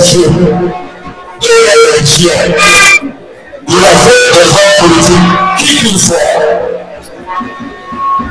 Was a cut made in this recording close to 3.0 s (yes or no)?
no